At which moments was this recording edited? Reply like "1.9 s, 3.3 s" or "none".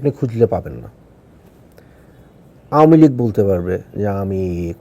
2.0 s